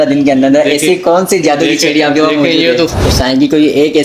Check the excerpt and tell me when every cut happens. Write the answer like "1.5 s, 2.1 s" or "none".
2.9 s